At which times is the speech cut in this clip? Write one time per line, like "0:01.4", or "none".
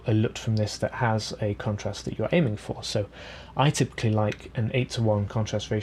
none